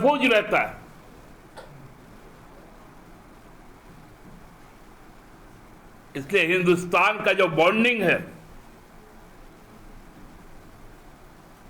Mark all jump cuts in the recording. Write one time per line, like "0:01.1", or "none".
none